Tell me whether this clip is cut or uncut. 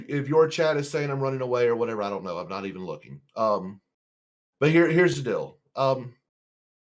uncut